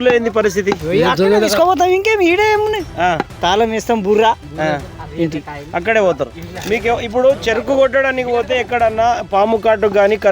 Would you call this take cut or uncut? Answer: uncut